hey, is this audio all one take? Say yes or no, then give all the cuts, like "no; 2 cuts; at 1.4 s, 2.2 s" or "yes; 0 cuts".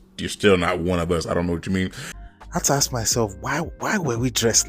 no; 1 cut; at 2.1 s